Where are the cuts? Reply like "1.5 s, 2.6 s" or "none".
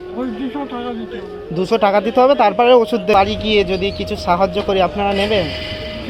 3.1 s